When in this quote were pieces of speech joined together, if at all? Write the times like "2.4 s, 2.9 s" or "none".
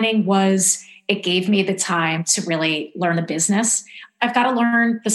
4.1 s